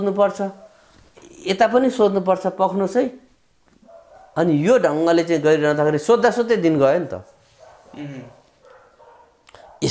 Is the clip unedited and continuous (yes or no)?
yes